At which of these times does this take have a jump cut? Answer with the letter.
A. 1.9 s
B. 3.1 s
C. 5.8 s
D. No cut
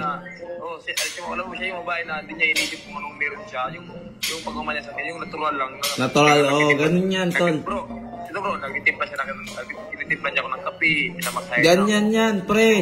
D